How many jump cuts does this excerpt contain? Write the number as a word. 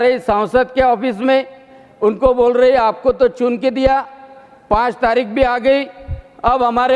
zero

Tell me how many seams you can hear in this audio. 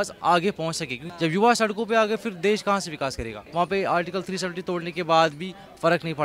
two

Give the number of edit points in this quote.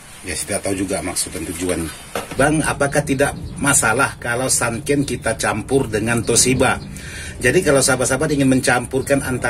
one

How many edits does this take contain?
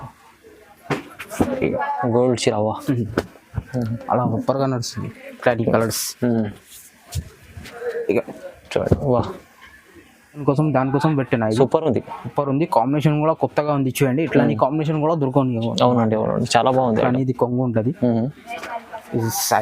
one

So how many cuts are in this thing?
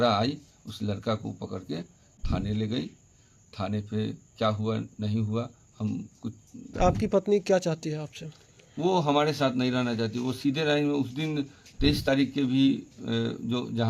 one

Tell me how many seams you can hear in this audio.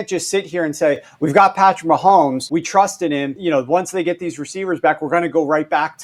two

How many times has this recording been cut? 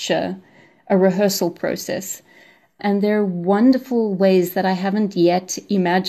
zero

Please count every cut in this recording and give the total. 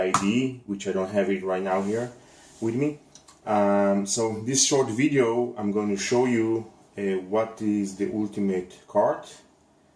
one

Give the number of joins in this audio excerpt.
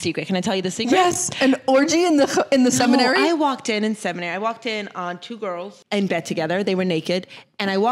one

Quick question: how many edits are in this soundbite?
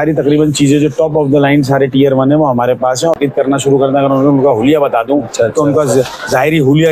one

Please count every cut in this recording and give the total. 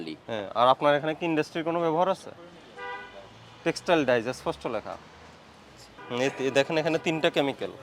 one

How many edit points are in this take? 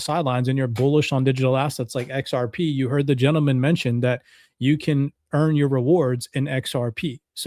zero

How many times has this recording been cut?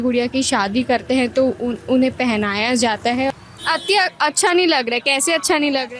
one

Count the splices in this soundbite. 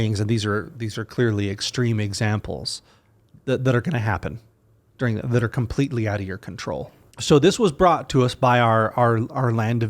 one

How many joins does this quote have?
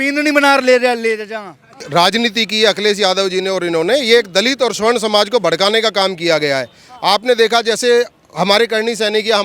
one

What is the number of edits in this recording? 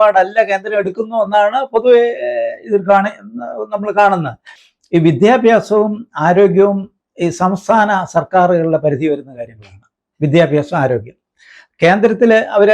one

